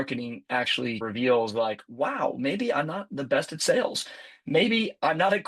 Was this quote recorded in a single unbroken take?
no; 1 cut; at 1.0 s

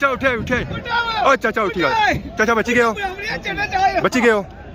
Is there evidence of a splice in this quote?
no; 0 cuts

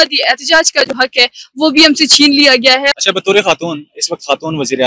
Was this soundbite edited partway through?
yes; 1 cut; at 2.9 s

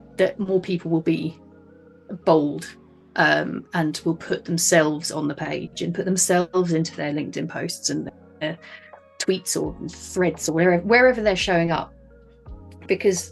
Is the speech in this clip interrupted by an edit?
no; 0 cuts

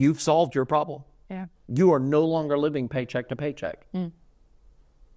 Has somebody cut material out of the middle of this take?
no; 0 cuts

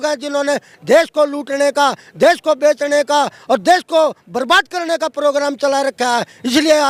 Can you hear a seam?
no; 0 cuts

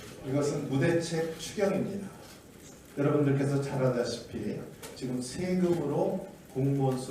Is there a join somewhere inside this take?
yes; 1 cut; at 4.9 s

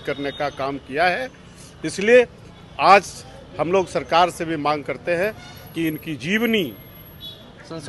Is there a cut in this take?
no; 0 cuts

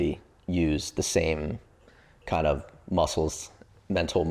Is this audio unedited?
yes; 0 cuts

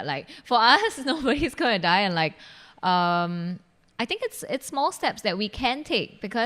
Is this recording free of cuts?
yes; 0 cuts

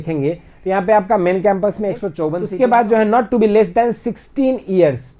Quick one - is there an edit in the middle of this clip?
yes; 1 cut; at 2.4 s

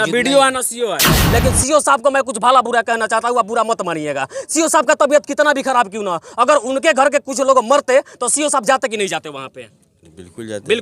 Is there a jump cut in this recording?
yes; 1 cut; at 1.2 s

